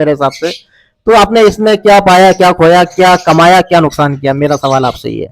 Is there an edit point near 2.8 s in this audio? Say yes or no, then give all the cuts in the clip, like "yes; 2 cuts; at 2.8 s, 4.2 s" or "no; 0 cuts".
no; 0 cuts